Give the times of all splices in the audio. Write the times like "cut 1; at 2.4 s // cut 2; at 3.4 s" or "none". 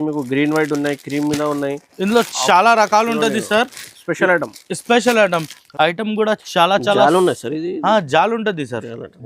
cut 1; at 5.6 s